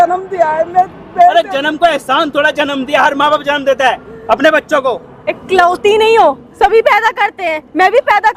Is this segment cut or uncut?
uncut